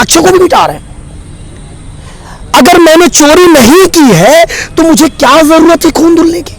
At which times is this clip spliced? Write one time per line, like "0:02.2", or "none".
none